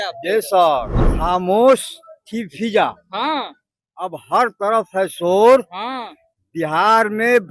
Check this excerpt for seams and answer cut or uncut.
cut